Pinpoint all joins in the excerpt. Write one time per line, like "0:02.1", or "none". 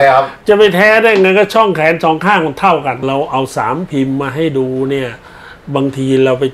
0:03.0

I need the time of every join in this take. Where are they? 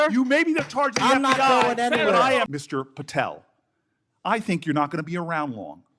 0:02.5

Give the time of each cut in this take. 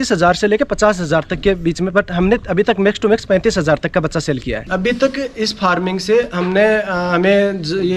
0:04.7

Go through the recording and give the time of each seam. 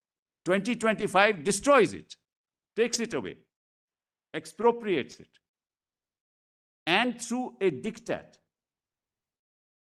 none

